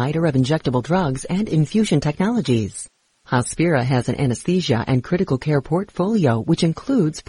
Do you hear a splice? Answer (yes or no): no